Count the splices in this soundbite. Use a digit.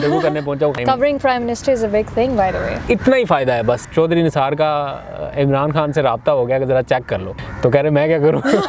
3